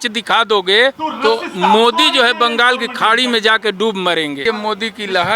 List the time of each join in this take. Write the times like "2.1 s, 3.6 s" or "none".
1.1 s, 4.4 s